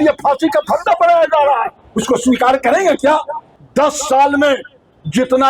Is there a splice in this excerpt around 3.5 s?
yes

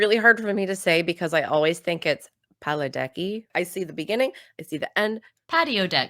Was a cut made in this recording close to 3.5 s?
yes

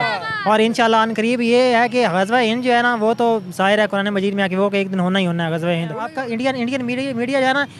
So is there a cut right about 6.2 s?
yes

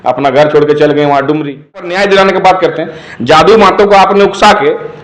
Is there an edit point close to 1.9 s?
yes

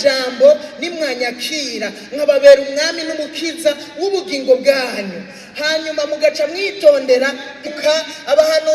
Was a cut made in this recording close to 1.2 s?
no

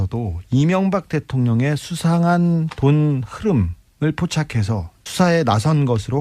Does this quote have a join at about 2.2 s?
no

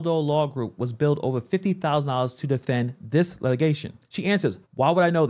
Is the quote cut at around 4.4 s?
yes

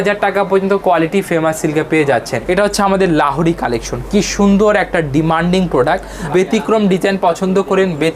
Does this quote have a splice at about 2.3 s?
yes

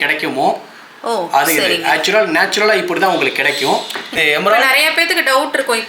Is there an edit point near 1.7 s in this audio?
no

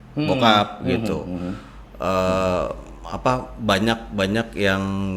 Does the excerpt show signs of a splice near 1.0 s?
no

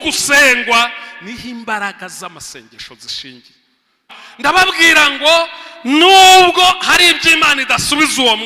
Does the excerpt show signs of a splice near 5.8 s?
no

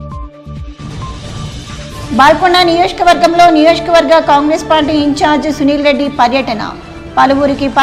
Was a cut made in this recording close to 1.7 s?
no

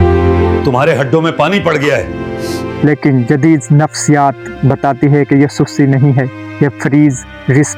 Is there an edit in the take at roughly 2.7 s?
yes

